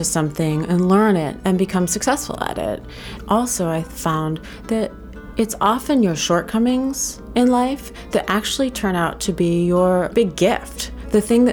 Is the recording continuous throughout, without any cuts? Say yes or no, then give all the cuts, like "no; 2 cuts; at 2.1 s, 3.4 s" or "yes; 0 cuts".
no; 3 cuts; at 1.4 s, 3.1 s, 10.1 s